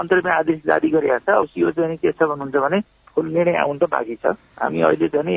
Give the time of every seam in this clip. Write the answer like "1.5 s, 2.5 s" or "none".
none